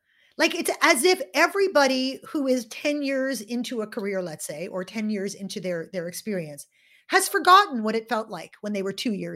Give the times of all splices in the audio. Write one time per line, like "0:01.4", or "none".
none